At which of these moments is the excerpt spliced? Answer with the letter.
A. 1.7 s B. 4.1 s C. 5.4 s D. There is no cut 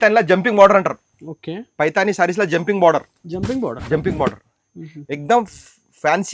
D